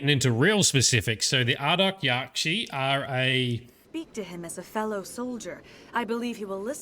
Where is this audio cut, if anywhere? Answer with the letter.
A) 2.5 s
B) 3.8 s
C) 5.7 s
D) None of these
B